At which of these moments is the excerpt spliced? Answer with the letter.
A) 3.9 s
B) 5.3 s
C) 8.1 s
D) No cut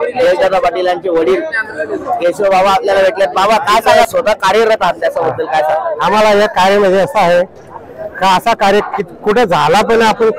A